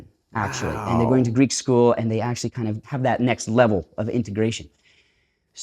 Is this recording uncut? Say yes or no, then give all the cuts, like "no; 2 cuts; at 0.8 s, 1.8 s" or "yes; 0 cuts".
no; 1 cut; at 2.9 s